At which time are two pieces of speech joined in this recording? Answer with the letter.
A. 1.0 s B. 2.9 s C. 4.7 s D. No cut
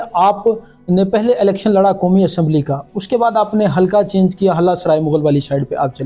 D